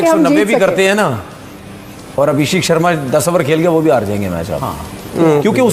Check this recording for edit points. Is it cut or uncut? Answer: uncut